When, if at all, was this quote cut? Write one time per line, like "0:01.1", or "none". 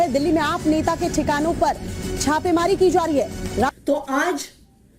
0:03.7